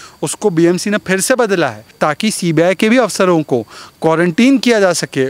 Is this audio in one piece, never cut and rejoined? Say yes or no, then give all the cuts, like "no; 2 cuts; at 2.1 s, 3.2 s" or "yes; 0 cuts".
no; 1 cut; at 1.9 s